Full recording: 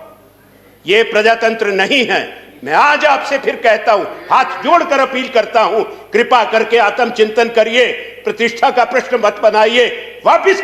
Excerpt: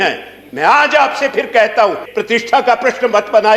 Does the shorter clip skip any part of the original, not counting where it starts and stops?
yes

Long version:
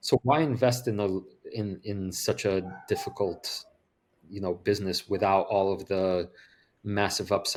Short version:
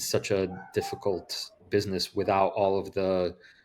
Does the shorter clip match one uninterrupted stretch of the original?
no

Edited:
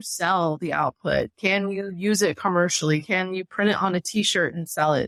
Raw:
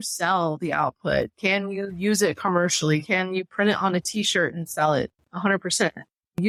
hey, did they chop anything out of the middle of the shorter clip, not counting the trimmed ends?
no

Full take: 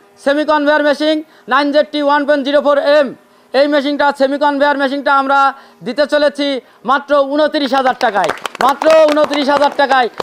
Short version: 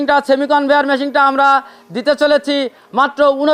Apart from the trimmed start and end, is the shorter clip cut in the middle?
no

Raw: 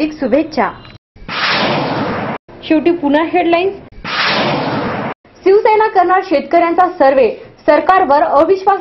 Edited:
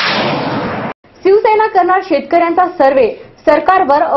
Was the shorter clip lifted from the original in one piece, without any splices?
no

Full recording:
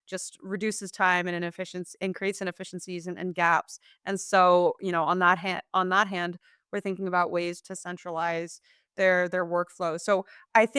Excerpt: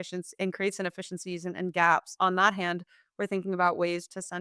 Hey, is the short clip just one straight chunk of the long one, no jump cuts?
no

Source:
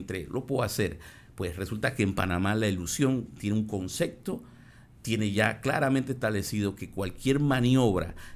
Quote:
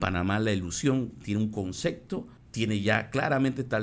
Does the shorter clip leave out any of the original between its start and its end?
yes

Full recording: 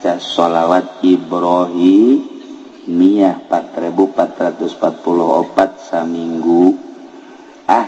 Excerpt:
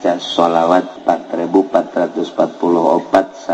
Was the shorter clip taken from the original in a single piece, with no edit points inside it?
no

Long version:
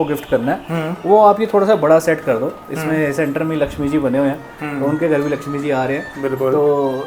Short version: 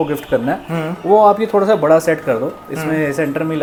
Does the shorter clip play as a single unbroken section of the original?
yes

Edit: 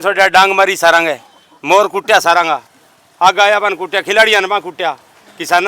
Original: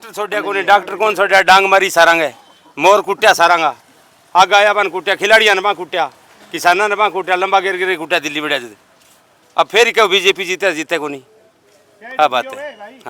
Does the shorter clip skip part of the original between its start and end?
no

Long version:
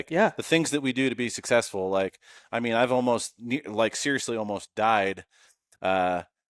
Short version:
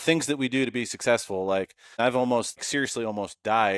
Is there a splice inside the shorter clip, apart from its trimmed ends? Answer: yes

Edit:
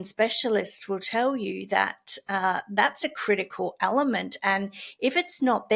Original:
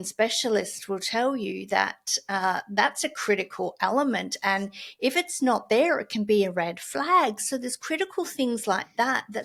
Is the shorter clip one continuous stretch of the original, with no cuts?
yes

